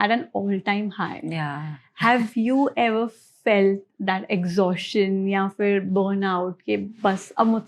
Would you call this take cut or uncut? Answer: uncut